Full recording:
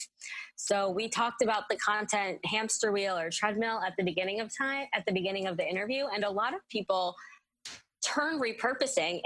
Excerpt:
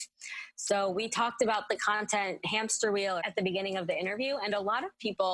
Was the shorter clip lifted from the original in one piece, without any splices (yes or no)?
no